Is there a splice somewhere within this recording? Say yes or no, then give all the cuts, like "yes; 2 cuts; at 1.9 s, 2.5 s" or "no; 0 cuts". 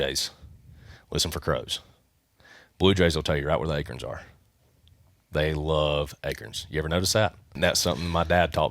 yes; 1 cut; at 7.6 s